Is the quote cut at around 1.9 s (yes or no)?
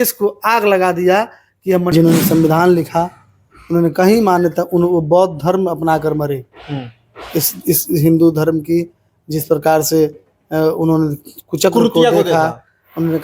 yes